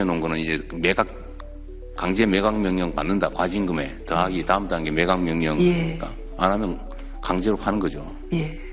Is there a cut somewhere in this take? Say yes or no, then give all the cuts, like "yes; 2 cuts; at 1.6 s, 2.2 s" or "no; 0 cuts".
no; 0 cuts